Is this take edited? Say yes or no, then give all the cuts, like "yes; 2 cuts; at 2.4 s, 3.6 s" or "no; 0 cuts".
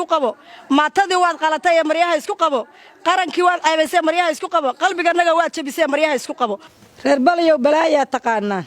yes; 1 cut; at 6.8 s